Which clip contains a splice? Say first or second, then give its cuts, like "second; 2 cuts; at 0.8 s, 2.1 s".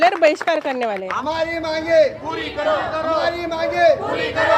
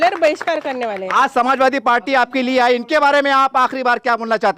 first; 1 cut; at 1.1 s